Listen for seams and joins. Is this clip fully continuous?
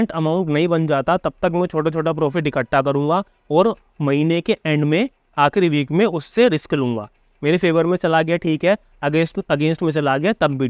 yes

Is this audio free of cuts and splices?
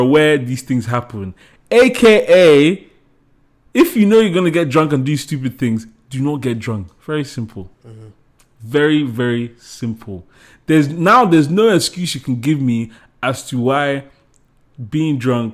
yes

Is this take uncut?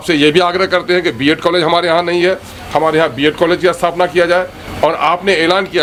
yes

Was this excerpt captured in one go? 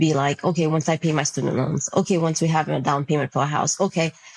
yes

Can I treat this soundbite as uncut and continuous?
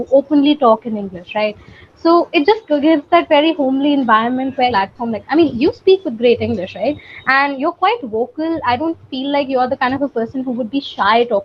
no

